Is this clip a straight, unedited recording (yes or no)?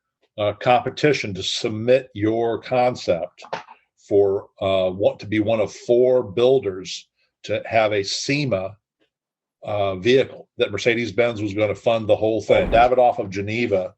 no